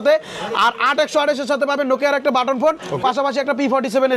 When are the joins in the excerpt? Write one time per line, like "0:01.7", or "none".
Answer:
none